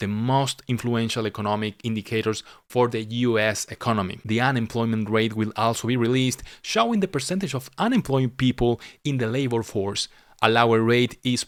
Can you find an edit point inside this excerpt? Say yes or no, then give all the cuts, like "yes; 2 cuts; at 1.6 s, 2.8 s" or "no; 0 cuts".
no; 0 cuts